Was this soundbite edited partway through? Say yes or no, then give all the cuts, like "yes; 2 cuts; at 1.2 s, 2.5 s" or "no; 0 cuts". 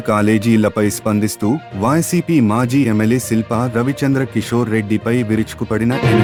no; 0 cuts